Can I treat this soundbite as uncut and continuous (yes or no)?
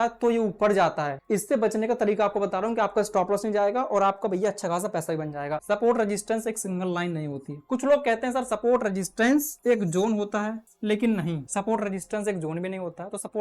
no